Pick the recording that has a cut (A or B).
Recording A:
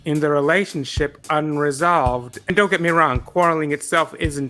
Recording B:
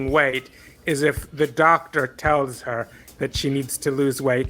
A